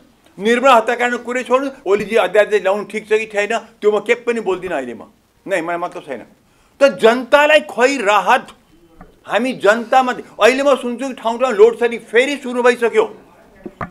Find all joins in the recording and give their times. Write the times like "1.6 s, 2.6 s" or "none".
1.7 s